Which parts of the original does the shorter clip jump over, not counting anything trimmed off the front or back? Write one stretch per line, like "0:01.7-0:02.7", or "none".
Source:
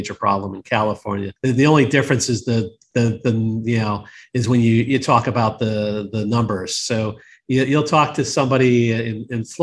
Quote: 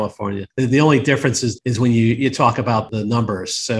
0:02.3-0:04.2
0:05.6-0:06.1